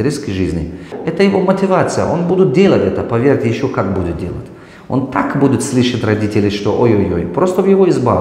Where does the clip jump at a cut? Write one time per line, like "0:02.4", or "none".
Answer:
0:01.0